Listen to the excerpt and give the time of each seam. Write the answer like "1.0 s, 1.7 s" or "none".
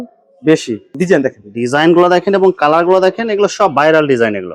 0.9 s